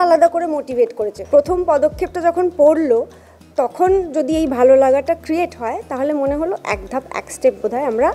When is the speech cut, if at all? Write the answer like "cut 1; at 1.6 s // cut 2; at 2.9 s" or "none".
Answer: cut 1; at 1.1 s